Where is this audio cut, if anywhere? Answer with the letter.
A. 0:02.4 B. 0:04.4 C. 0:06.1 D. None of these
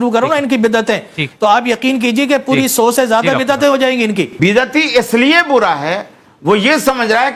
B